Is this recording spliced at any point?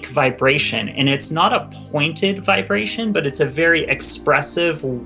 no; 0 cuts

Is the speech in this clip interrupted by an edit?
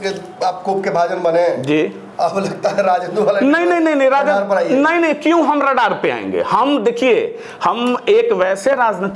no; 0 cuts

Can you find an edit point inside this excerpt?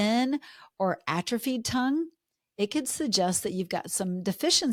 no; 0 cuts

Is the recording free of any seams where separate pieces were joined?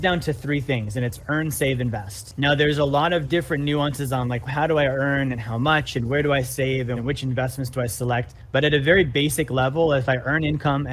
no; 4 cuts; at 2.3 s, 4.5 s, 7.0 s, 8.4 s

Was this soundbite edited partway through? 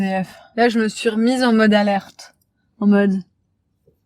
no; 0 cuts

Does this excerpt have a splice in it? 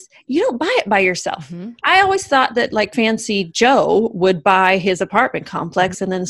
yes; 1 cut; at 2.9 s

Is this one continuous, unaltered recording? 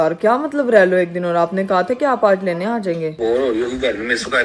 no; 1 cut; at 3.1 s

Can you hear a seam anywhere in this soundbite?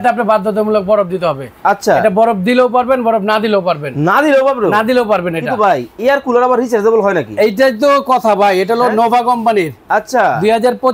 no; 0 cuts

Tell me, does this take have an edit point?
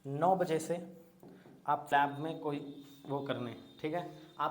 yes; 1 cut; at 1.9 s

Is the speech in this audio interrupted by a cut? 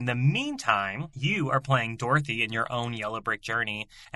yes; 1 cut; at 1.0 s

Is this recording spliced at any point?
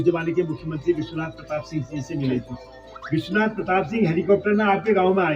no; 0 cuts

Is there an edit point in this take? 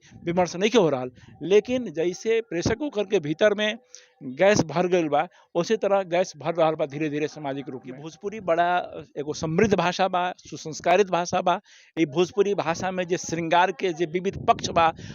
yes; 1 cut; at 8.1 s

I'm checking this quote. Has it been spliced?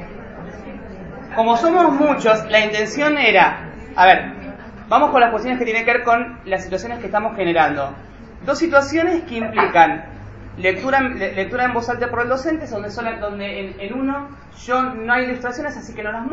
yes; 1 cut; at 2.2 s

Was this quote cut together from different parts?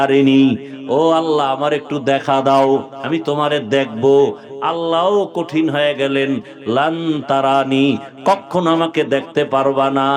no; 0 cuts

